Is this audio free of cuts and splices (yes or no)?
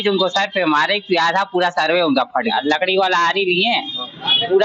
no